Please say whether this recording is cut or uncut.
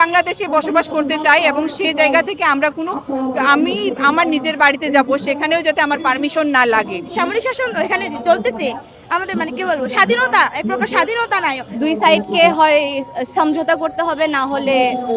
cut